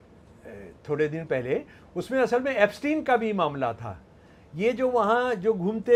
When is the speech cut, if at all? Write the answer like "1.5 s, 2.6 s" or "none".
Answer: none